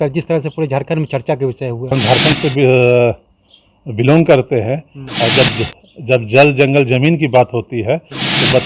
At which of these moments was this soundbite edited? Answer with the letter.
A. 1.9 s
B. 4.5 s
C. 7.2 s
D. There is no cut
A